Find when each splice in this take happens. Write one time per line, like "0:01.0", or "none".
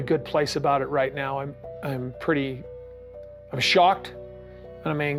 none